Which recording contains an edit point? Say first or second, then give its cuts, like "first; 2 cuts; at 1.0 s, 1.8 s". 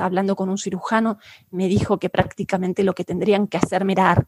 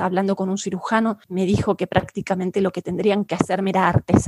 second; 1 cut; at 1.2 s